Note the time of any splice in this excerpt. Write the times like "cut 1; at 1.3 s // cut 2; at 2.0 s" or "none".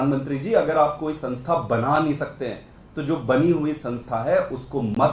none

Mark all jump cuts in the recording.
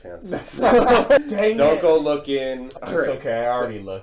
cut 1; at 1.2 s // cut 2; at 2.6 s

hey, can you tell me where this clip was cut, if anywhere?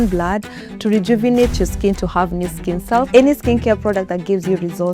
cut 1; at 3.1 s

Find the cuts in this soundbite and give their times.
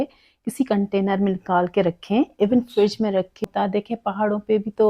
cut 1; at 3.4 s

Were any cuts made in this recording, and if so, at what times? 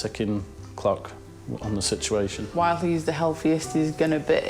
cut 1; at 2.4 s

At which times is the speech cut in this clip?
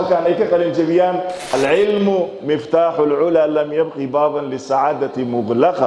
cut 1; at 1.5 s

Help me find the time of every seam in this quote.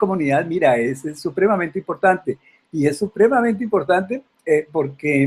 cut 1; at 4.1 s

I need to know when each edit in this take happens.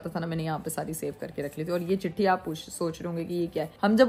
none

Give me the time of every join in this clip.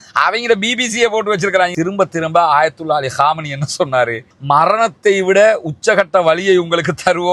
cut 1; at 1.7 s

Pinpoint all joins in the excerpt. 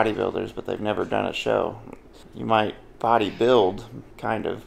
none

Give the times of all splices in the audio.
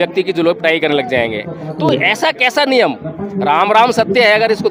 none

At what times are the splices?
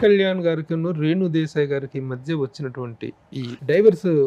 none

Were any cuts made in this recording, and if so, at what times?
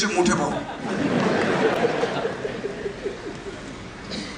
none

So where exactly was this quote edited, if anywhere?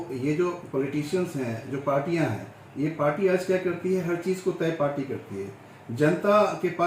none

